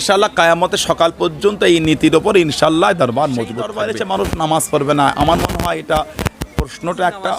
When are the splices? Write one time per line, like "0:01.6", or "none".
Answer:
0:03.8

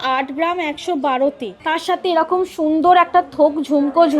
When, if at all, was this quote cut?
0:01.5

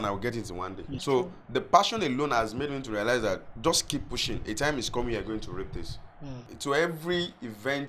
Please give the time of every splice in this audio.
0:01.0
0:06.5

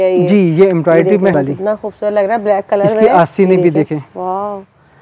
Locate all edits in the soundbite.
0:01.3

